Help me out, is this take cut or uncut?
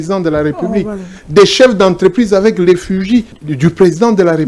cut